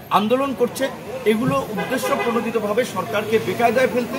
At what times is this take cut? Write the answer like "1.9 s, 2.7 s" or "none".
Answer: none